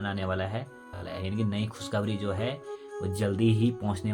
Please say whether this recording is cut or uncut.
cut